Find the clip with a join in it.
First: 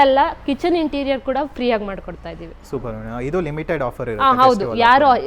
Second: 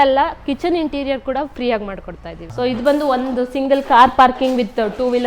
second; 1 cut; at 2.4 s

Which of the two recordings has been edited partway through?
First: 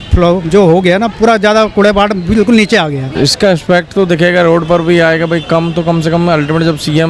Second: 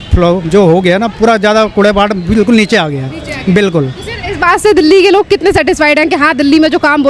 first; 1 cut; at 3.1 s

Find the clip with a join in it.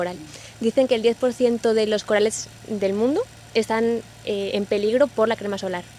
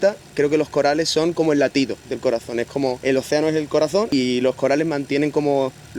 second; 2 cuts; at 3.0 s, 4.1 s

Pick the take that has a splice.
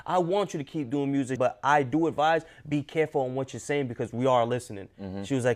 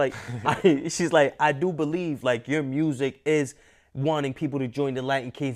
first; 1 cut; at 1.4 s

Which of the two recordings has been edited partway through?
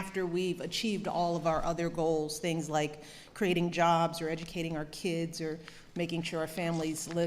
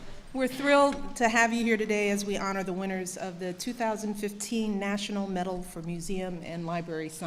first; 1 cut; at 1.3 s

